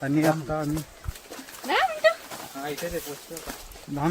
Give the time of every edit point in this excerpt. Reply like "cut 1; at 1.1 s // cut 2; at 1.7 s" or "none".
cut 1; at 2.8 s